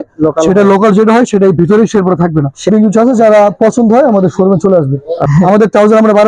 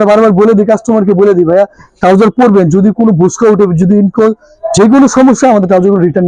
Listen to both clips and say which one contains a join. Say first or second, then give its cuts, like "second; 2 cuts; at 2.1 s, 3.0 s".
first; 2 cuts; at 2.7 s, 5.2 s